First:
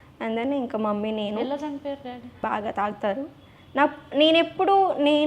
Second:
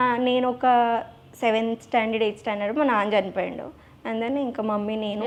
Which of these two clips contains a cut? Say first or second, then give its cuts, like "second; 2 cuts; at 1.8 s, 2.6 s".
first; 1 cut; at 2.3 s